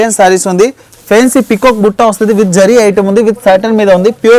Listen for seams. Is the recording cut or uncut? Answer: uncut